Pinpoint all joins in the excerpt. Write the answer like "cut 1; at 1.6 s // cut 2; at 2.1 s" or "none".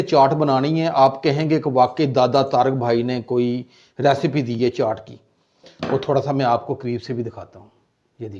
cut 1; at 5.7 s